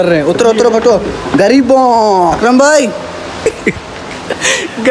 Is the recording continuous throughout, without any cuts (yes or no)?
no